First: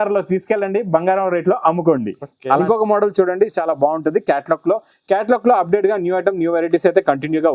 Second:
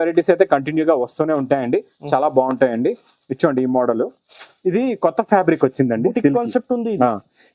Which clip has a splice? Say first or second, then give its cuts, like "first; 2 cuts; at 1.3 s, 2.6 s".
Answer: first; 1 cut; at 2.6 s